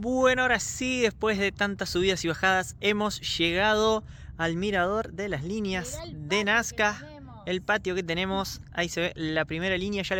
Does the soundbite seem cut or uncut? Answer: uncut